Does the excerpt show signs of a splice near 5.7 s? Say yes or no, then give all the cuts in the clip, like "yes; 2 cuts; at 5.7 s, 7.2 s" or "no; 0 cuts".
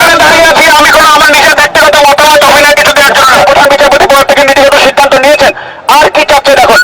no; 1 cut; at 3.4 s